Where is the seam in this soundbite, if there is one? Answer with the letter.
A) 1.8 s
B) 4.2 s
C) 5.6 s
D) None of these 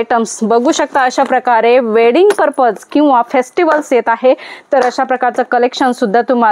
D